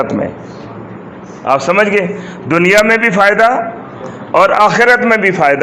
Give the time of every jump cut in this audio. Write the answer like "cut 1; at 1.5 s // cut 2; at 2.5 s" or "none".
none